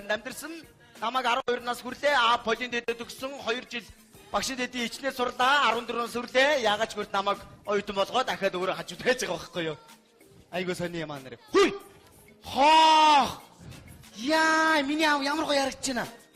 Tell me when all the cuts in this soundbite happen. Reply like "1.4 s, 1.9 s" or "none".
3.4 s